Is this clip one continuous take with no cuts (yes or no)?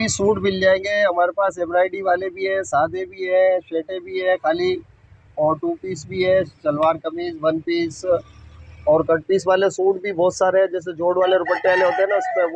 yes